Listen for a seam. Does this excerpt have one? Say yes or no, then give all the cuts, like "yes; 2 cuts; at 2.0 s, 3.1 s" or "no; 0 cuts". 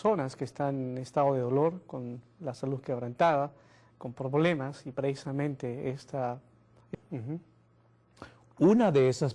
no; 0 cuts